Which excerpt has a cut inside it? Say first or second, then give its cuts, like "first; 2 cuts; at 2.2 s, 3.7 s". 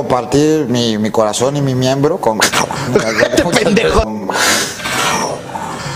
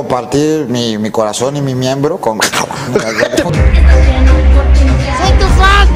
second; 1 cut; at 3.5 s